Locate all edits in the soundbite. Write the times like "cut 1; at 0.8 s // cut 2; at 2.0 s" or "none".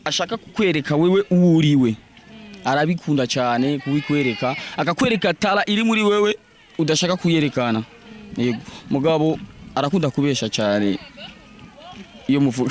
none